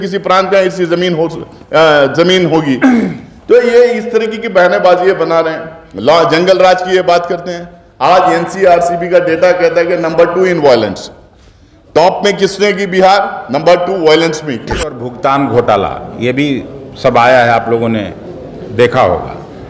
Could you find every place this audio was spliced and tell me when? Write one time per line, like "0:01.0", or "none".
0:15.1